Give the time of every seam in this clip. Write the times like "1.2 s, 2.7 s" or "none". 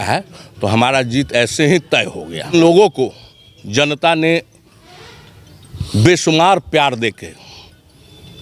2.5 s